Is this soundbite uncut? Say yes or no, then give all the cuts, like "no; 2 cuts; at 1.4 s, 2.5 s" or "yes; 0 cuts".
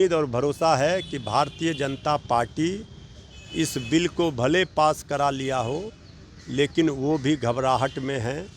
yes; 0 cuts